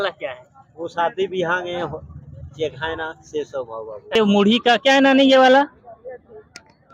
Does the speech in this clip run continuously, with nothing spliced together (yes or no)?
no